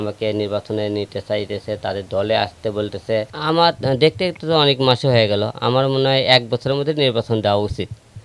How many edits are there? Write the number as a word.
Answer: one